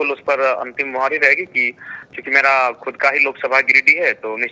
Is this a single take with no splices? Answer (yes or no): yes